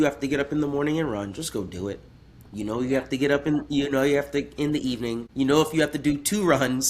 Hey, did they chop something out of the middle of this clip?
yes; 1 cut; at 5.2 s

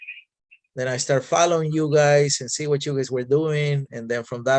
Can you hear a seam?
no; 0 cuts

